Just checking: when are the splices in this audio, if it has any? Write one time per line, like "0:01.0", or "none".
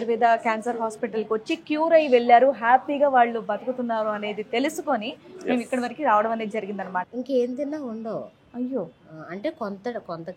0:07.1